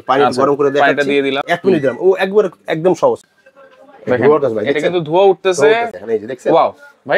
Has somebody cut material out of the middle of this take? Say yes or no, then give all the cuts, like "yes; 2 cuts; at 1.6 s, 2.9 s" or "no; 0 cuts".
yes; 3 cuts; at 1.4 s, 3.3 s, 5.9 s